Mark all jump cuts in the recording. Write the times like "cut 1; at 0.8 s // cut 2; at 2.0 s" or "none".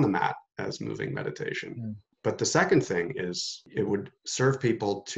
cut 1; at 2.1 s // cut 2; at 3.6 s